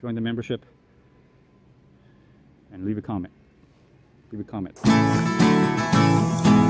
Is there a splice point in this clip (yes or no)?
yes